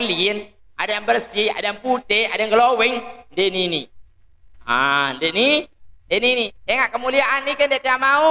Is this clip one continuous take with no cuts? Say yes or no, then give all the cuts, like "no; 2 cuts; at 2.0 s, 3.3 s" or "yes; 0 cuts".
yes; 0 cuts